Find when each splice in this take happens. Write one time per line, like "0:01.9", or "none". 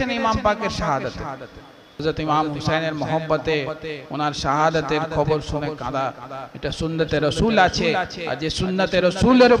0:02.0